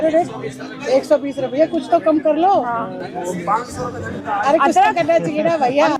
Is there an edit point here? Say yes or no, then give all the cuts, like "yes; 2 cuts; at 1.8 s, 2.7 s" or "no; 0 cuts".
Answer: no; 0 cuts